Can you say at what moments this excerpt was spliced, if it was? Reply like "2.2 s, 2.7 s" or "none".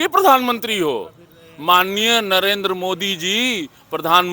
none